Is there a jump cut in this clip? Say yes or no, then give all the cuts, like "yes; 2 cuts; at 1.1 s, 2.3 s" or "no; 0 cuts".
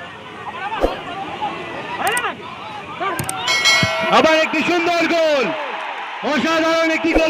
no; 0 cuts